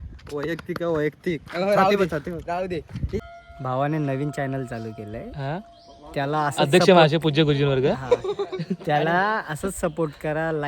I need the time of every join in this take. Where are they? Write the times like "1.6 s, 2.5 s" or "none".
3.3 s